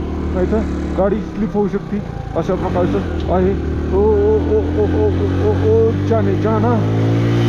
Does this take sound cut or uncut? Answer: uncut